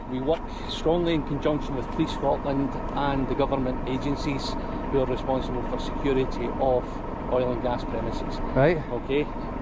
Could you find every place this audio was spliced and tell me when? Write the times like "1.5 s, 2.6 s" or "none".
none